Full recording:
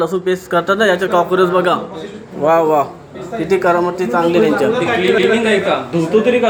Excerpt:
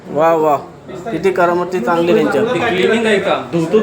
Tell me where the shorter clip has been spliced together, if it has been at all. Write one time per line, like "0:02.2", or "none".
0:02.8